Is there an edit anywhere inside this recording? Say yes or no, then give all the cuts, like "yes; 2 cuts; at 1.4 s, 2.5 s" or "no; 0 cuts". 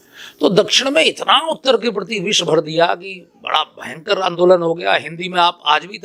no; 0 cuts